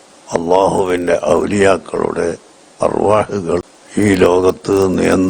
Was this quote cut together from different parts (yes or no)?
yes